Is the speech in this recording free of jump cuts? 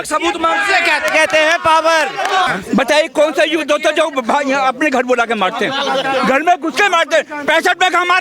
no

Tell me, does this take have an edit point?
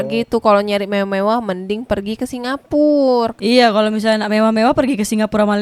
no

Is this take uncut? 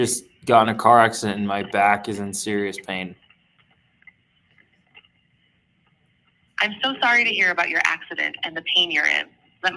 yes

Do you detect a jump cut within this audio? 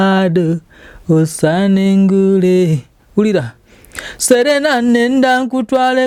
no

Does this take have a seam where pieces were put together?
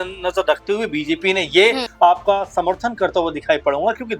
yes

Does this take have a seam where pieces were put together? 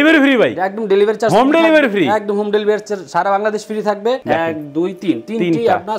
yes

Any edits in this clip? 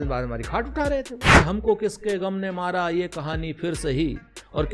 yes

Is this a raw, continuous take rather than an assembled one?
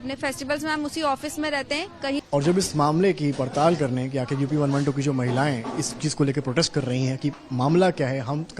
no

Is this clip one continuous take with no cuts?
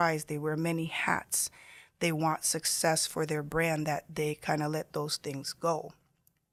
yes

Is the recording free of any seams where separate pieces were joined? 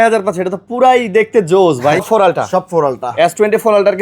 no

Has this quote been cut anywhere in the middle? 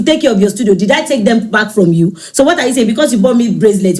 no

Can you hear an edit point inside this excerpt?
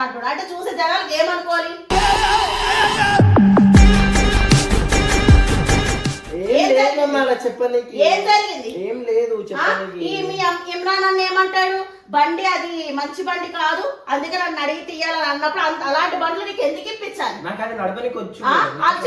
no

